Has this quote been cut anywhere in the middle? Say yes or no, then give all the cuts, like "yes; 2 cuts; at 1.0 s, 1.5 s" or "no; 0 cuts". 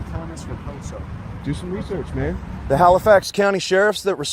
yes; 1 cut; at 2.5 s